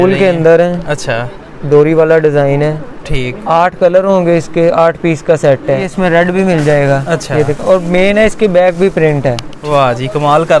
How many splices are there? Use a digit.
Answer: 2